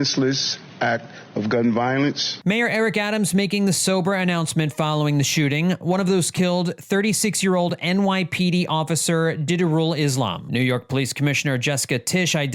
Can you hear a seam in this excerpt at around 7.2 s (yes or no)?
no